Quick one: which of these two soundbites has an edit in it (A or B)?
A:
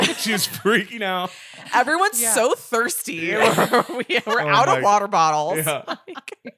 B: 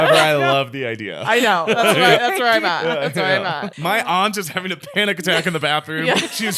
B